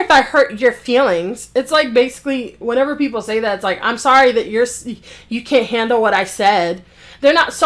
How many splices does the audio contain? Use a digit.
0